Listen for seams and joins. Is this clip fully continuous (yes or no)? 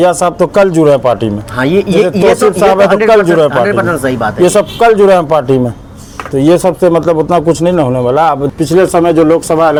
yes